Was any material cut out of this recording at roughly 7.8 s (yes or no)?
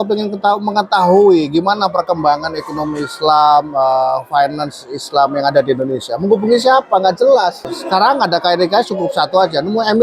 yes